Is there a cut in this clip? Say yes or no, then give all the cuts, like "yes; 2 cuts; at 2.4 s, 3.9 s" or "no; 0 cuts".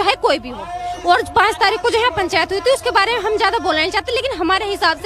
no; 0 cuts